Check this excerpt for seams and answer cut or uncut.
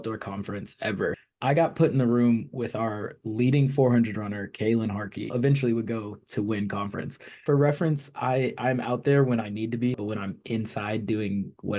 cut